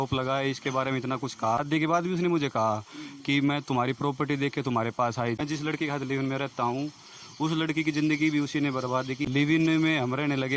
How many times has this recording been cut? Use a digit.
3